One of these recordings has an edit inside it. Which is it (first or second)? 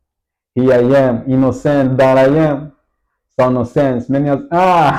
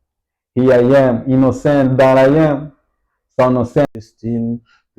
second